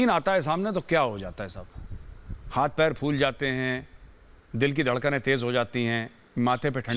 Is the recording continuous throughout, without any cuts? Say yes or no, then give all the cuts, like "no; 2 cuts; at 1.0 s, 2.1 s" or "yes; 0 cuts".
yes; 0 cuts